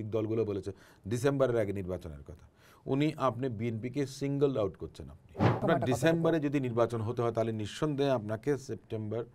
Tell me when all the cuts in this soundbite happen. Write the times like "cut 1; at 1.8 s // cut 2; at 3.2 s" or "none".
cut 1; at 5.6 s